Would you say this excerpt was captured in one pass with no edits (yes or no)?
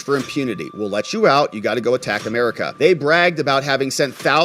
no